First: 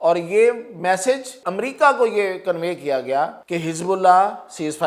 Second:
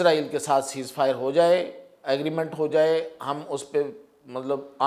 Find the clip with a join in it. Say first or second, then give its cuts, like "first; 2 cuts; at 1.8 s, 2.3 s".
first; 2 cuts; at 1.4 s, 3.4 s